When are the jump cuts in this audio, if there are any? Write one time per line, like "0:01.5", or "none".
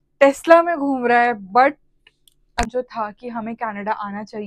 0:02.7